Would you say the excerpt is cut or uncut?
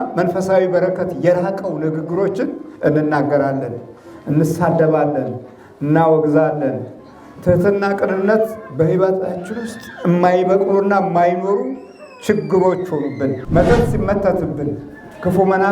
cut